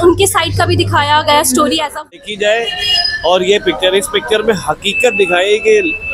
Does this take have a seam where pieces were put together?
yes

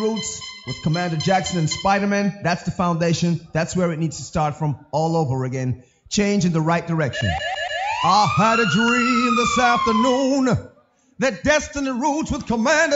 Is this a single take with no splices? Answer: no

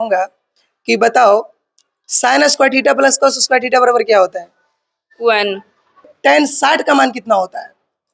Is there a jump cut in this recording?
yes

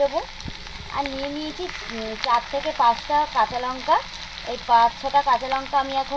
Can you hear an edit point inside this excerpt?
no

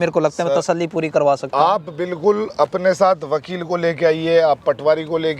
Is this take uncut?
yes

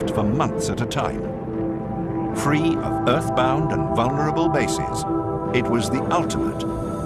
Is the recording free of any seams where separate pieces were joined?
yes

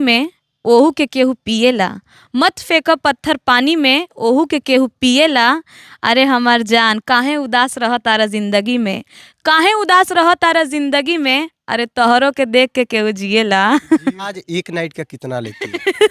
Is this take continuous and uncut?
no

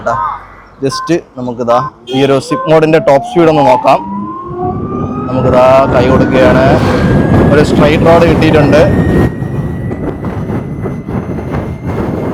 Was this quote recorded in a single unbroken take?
yes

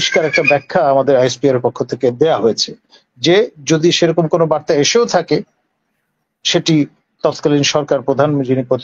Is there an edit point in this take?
no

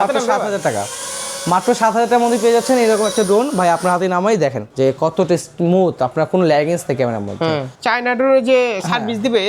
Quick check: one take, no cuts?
no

